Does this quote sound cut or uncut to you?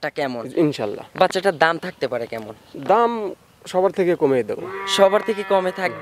uncut